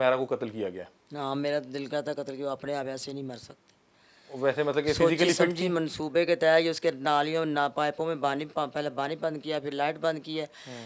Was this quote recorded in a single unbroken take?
yes; 0 cuts

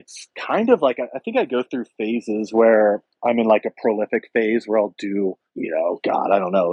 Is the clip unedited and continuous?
no; 2 cuts; at 3.1 s, 5.5 s

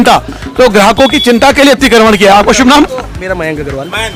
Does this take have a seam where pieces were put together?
no; 0 cuts

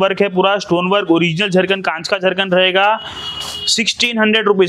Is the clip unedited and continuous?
yes; 0 cuts

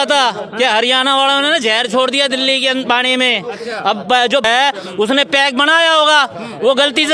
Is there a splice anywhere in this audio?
yes; 1 cut; at 4.4 s

